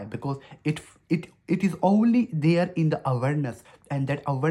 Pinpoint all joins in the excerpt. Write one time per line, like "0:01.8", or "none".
none

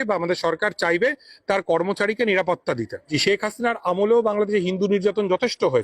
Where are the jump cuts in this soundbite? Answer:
0:03.1

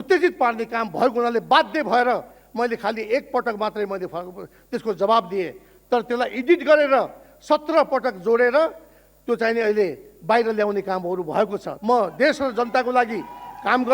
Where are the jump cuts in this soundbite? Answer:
0:11.7

